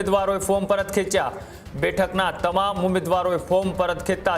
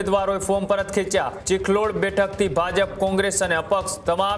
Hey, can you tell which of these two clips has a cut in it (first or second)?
second